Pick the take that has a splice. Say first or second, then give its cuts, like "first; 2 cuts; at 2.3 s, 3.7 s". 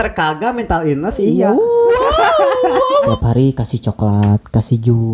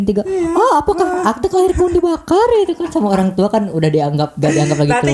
first; 1 cut; at 3.1 s